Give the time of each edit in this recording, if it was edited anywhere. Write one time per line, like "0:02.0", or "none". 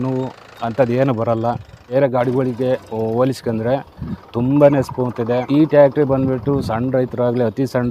0:01.8